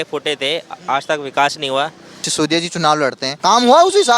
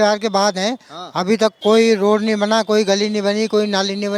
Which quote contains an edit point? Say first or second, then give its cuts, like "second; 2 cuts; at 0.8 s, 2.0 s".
first; 2 cuts; at 2.2 s, 3.3 s